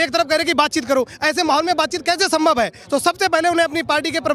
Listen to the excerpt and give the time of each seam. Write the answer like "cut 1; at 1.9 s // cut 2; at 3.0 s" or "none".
none